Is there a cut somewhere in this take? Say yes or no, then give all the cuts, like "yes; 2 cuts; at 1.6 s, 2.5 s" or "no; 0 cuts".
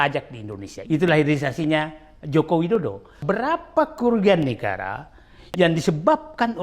yes; 2 cuts; at 0.9 s, 3.1 s